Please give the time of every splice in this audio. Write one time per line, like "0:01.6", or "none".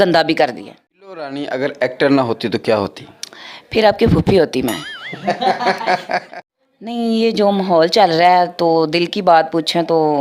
0:01.3
0:06.3